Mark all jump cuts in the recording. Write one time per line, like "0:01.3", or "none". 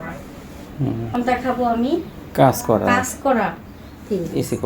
0:01.1